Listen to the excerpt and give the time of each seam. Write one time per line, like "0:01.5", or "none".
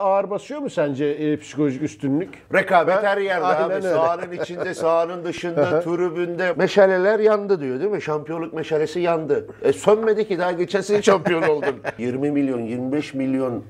0:02.4
0:06.5
0:12.0